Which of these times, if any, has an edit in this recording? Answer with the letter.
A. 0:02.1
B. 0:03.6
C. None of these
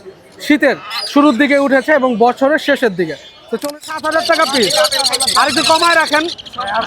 B